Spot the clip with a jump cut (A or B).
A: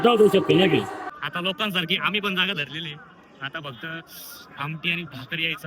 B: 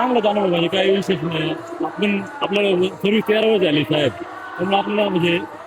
A